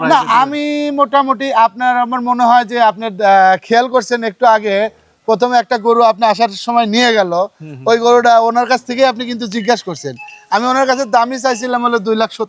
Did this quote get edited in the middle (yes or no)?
no